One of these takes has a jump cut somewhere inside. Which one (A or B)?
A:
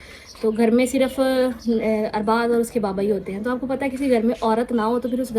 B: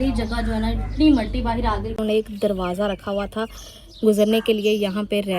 B